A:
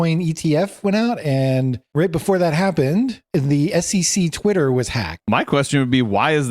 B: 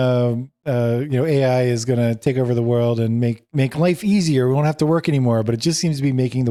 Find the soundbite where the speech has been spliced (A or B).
A